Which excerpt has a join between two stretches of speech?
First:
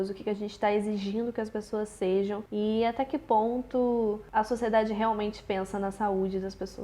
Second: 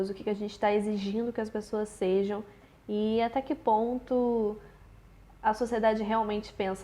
first; 2 cuts; at 2.4 s, 4.2 s

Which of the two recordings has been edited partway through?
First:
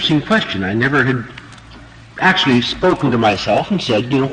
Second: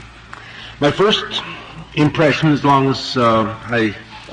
first; 1 cut; at 2.7 s

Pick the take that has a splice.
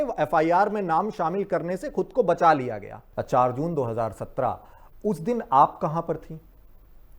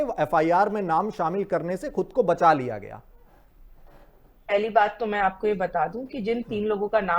first; 1 cut; at 3.0 s

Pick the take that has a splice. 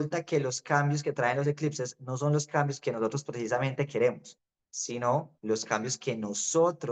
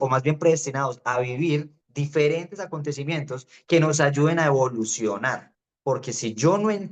second; 1 cut; at 5.7 s

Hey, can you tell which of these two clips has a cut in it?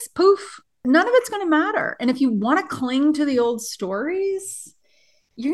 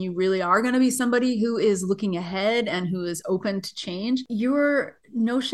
second; 1 cut; at 4.3 s

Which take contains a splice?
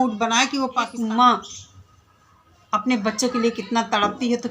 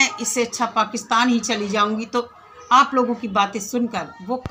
first; 1 cut; at 0.9 s

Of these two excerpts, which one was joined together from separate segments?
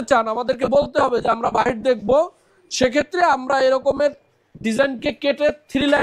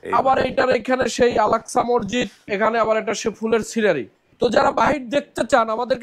second; 2 cuts; at 2.4 s, 4.2 s

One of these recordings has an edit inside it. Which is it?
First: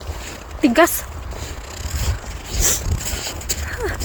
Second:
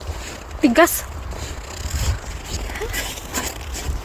second; 1 cut; at 2.6 s

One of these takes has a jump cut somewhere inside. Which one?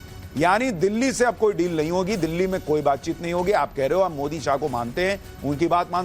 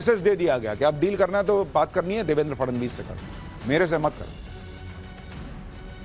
second; 1 cut; at 2.7 s

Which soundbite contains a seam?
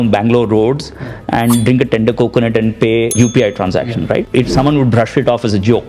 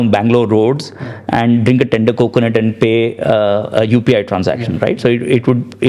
first; 2 cuts; at 3.1 s, 4.3 s

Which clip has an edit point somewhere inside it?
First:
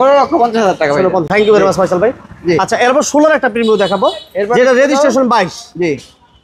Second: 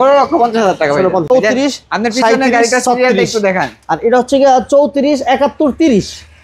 second; 1 cut; at 1.2 s

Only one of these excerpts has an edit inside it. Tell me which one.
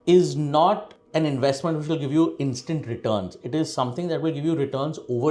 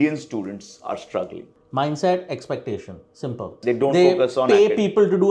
second; 2 cuts; at 1.6 s, 3.6 s

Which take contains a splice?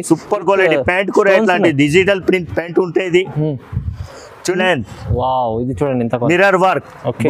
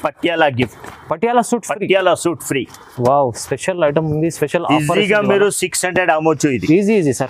first; 1 cut; at 4.6 s

